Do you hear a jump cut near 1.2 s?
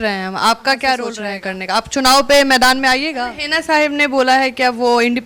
yes; 2 cuts; at 1.2 s, 3.1 s

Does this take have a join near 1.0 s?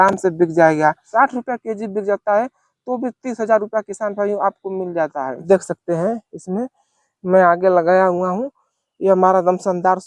yes; 2 cuts; at 1.0 s, 5.4 s

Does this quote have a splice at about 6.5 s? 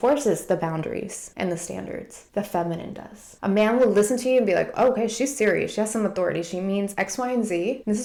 no; 0 cuts

